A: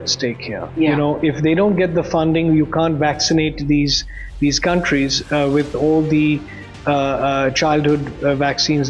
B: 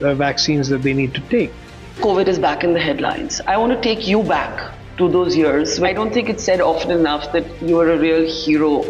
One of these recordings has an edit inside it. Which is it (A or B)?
B